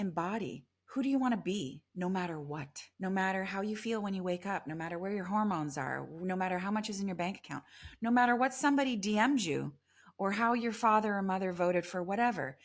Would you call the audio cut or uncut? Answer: cut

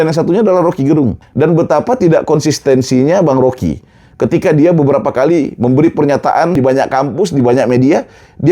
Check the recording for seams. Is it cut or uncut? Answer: cut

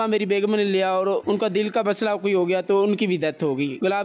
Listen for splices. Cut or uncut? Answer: uncut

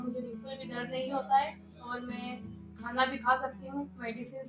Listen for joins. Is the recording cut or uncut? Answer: uncut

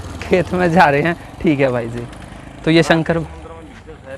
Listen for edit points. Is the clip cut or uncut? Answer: uncut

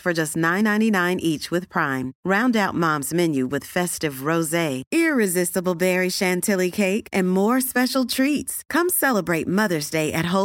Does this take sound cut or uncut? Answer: uncut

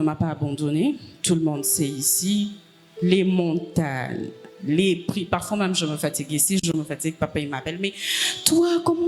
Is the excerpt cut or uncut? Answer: uncut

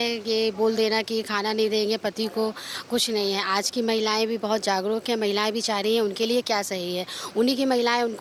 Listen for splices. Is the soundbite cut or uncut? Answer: uncut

